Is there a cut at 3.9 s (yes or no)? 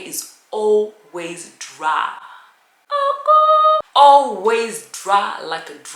yes